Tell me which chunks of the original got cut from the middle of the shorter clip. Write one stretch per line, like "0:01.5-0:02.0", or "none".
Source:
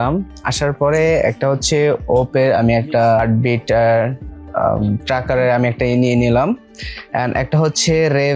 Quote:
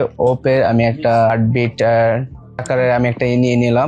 0:04.5-0:05.2